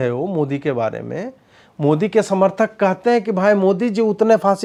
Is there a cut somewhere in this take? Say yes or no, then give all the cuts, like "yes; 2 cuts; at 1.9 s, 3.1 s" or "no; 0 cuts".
no; 0 cuts